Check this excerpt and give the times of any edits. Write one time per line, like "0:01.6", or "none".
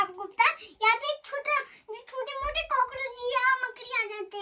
none